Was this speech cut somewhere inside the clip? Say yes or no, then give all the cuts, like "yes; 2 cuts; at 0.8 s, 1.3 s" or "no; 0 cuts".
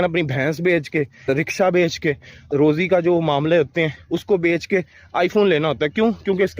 yes; 2 cuts; at 1.3 s, 2.5 s